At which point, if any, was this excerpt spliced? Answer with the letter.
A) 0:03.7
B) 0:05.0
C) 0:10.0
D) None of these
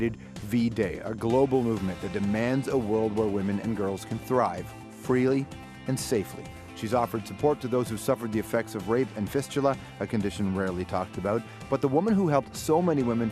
C